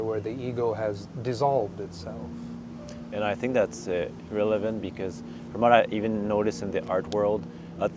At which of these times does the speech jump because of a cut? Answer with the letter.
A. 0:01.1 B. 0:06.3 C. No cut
A